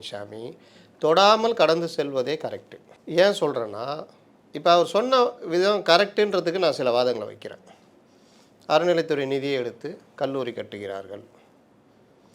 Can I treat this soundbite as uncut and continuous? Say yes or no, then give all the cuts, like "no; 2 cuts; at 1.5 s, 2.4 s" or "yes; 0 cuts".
yes; 0 cuts